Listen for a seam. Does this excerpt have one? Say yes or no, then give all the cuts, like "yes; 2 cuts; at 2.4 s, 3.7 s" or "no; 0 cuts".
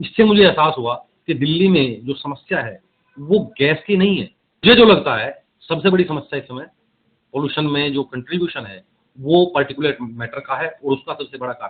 yes; 1 cut; at 4.6 s